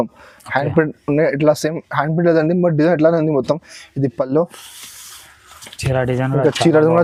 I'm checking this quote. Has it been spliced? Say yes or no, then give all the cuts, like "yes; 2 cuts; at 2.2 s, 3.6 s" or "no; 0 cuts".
no; 0 cuts